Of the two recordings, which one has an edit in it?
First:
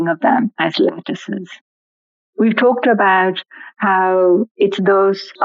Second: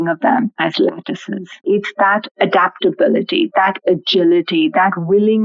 second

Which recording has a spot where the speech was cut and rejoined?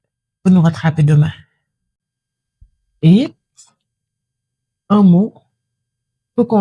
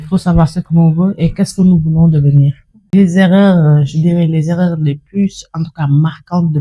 second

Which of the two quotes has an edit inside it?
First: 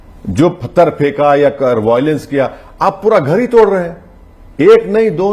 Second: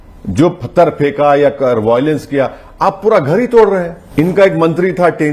second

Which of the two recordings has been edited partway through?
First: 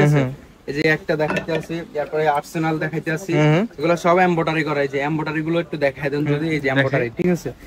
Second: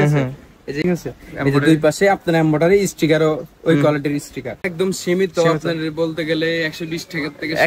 second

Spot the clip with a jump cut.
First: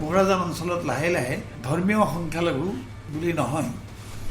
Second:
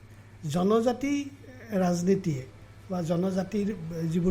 first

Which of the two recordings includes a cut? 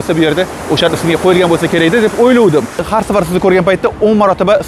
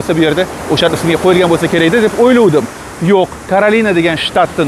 first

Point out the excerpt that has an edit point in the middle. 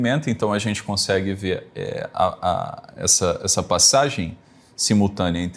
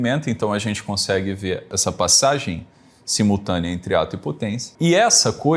second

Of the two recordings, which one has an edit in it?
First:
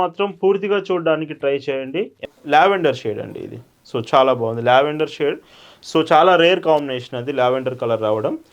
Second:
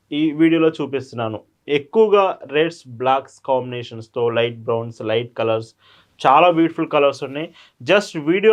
first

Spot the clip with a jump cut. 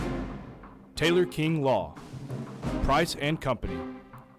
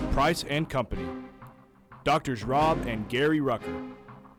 first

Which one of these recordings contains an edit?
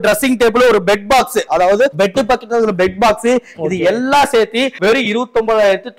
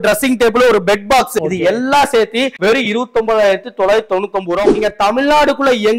second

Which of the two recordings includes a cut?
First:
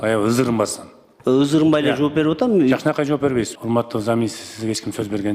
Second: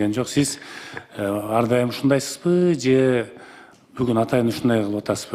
first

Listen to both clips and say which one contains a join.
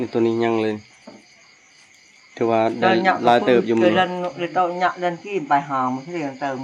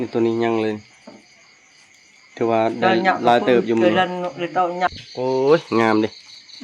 second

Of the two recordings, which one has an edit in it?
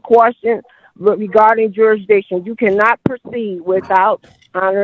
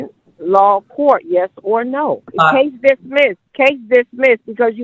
second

